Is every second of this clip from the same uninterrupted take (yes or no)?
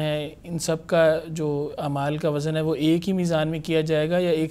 yes